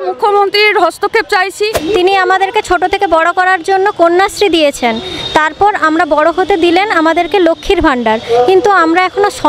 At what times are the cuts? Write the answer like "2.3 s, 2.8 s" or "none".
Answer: 1.7 s